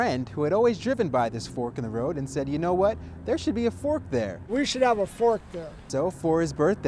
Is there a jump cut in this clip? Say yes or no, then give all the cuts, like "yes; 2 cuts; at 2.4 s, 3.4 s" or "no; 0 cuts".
no; 0 cuts